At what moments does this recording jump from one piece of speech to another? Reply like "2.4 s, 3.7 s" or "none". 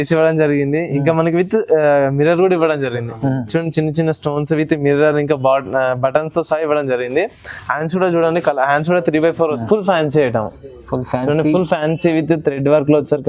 9.4 s